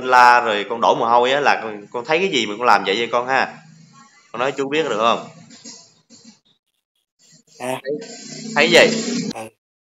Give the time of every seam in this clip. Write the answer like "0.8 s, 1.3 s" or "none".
none